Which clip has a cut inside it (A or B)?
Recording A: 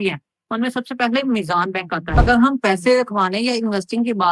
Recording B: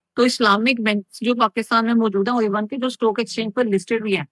A